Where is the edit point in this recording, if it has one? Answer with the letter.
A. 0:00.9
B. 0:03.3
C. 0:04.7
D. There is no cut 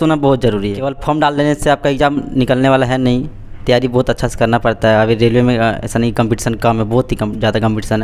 A